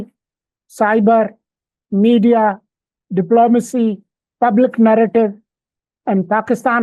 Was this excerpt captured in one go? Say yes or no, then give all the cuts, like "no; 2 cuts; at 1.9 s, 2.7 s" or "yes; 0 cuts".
yes; 0 cuts